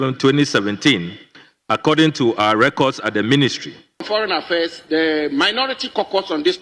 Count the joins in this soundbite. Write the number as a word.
one